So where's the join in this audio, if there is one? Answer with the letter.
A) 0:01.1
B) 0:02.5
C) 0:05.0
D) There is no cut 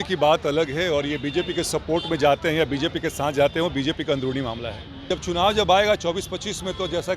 C